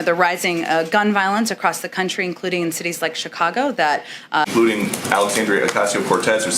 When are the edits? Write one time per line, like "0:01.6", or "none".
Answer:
0:04.5